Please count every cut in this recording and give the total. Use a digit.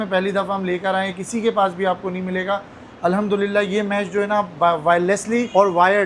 0